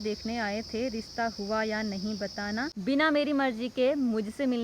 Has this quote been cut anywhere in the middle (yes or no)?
yes